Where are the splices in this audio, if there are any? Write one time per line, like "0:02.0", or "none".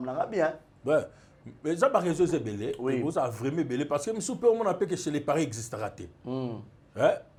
none